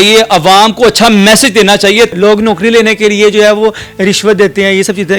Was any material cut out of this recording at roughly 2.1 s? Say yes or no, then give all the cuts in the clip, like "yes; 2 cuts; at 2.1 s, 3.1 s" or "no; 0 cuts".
yes; 1 cut; at 2.1 s